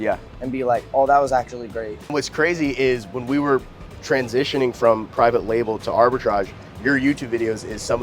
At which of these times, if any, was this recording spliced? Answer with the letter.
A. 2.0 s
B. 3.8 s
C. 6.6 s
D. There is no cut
A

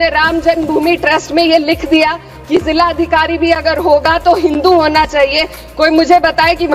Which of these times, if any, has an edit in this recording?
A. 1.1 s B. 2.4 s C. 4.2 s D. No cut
D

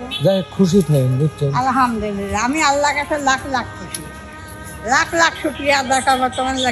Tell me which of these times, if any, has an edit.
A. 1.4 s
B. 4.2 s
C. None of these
C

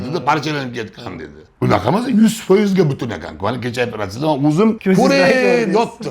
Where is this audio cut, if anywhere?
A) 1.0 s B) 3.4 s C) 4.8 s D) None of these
C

